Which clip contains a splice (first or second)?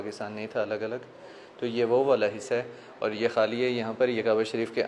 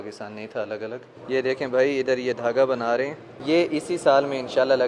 second